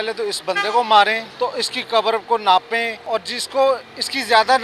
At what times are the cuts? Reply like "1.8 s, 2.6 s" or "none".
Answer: 1.7 s, 3.0 s